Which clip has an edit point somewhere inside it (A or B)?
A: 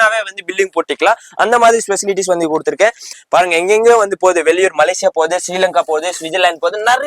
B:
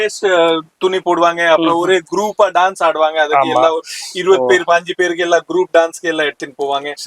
A